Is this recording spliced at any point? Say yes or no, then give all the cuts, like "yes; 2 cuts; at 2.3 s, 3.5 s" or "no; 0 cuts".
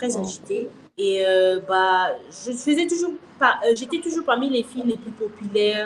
no; 0 cuts